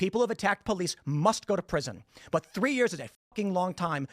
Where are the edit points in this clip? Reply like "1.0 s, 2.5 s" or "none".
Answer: 2.5 s

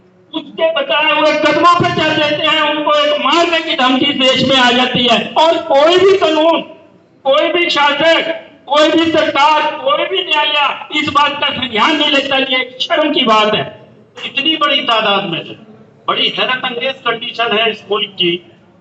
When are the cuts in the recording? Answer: 14.3 s

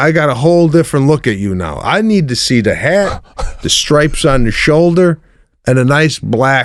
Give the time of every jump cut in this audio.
none

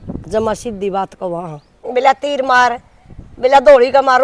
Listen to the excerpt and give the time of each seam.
1.7 s

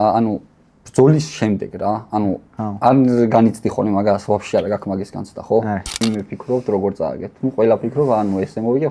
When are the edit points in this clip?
6.0 s

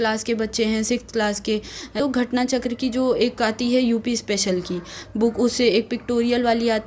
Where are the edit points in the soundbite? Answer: 2.0 s

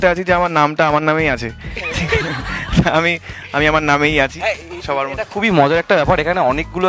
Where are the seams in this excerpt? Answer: none

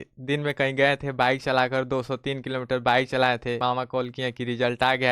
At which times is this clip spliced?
3.6 s

